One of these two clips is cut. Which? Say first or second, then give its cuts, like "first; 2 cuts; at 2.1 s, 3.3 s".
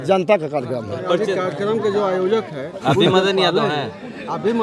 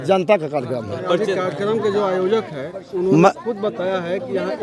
first; 1 cut; at 2.7 s